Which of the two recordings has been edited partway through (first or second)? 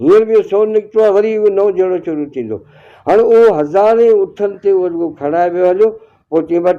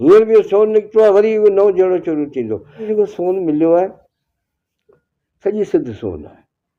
second